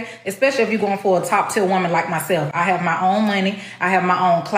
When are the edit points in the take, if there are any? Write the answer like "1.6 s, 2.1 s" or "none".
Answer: none